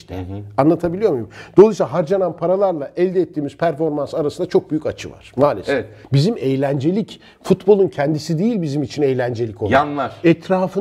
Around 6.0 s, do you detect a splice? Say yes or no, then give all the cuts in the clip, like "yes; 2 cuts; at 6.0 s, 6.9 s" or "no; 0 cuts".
yes; 1 cut; at 6.0 s